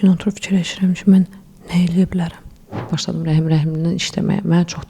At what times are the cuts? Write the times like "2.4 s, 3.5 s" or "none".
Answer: 3.0 s